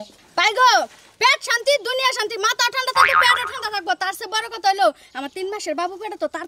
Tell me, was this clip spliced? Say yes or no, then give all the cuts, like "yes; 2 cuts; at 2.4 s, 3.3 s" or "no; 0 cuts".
no; 0 cuts